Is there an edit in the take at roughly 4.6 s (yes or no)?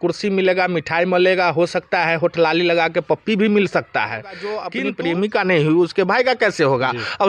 yes